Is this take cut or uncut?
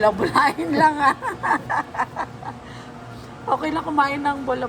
uncut